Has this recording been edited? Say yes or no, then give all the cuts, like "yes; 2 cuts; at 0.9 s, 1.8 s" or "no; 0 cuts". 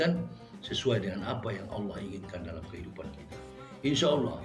no; 0 cuts